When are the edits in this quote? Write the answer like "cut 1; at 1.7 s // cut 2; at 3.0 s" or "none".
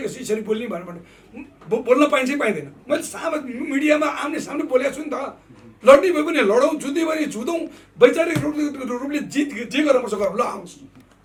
none